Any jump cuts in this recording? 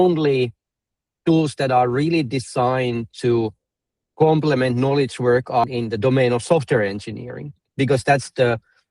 yes; 1 cut; at 5.7 s

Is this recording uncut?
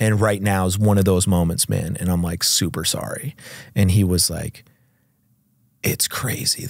yes; 0 cuts

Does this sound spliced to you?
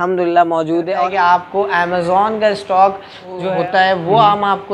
yes; 2 cuts; at 0.9 s, 3.5 s

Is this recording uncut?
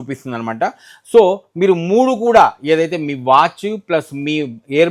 yes; 0 cuts

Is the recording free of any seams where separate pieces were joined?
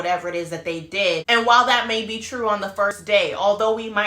no; 1 cut; at 1.2 s

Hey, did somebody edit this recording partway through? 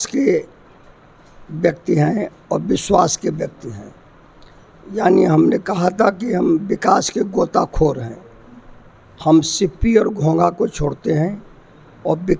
no; 0 cuts

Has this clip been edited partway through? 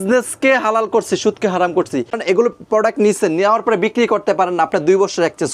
yes; 1 cut; at 2.2 s

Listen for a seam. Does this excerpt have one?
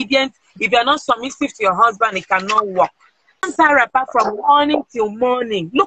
yes; 1 cut; at 3.5 s

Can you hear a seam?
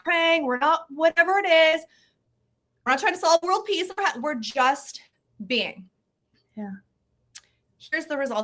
no; 0 cuts

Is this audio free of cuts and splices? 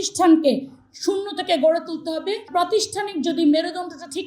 no; 1 cut; at 2.5 s

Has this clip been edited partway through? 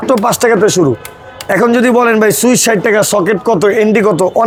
no; 0 cuts

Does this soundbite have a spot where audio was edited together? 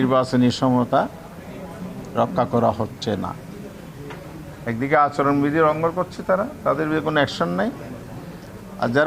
no; 0 cuts

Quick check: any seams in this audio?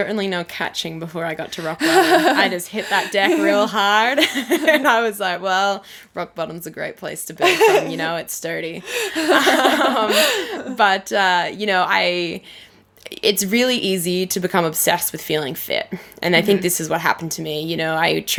no; 0 cuts

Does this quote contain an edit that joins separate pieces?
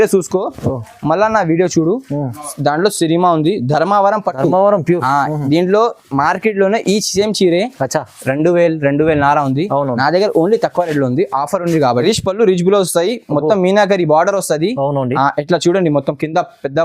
yes; 1 cut; at 12.0 s

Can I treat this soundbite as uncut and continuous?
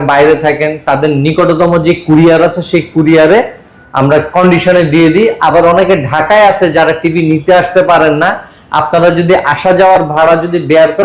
yes; 0 cuts

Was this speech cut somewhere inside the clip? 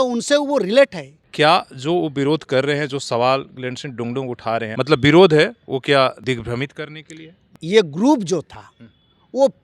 yes; 3 cuts; at 1.2 s, 4.7 s, 7.5 s

